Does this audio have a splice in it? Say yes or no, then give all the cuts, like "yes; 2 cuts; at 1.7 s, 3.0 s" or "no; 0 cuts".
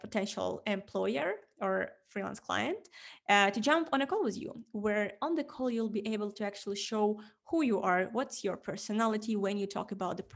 no; 0 cuts